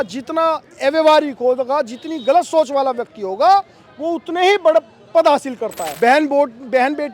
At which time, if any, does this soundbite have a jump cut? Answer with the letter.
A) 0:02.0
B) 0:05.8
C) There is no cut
B